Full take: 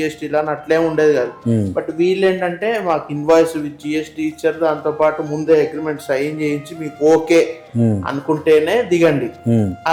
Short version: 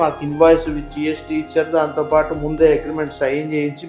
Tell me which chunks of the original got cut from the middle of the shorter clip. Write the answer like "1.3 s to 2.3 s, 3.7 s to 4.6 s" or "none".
none

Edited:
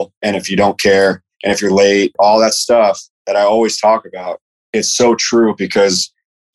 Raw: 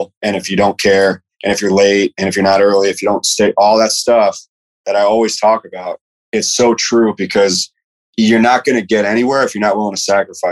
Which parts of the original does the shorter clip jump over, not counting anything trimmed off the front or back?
2.1 s to 3.5 s, 4.5 s to 4.7 s

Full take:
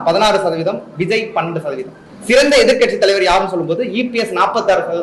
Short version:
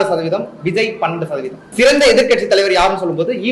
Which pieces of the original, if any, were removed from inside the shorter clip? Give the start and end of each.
1.9 s to 2.1 s

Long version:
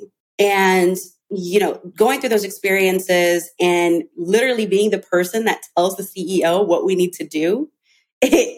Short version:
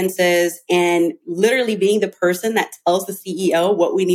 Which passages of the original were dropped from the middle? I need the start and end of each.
none

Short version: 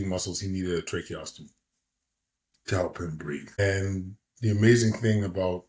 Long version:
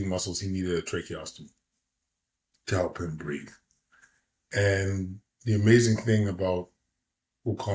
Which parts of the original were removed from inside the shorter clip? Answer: 3.6 s to 4.6 s

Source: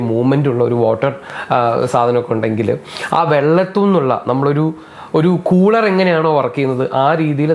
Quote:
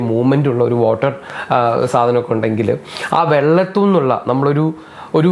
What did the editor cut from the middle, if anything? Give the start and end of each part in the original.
none

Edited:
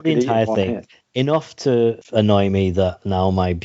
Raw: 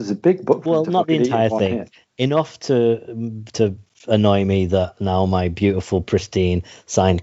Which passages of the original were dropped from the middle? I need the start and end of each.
3.1 s to 4.0 s

